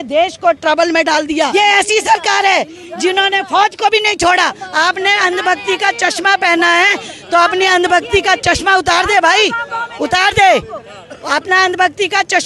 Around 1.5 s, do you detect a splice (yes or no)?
yes